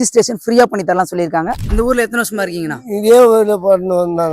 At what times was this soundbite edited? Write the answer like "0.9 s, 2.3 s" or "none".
1.6 s